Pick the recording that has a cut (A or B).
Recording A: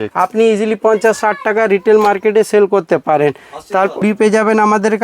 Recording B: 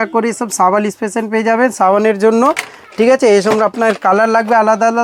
A